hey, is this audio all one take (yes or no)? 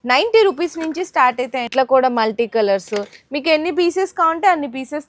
no